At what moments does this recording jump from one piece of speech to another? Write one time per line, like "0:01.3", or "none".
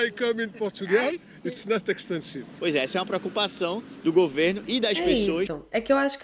none